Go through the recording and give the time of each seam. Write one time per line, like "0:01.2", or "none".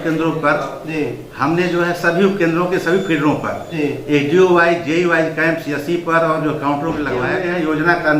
0:07.3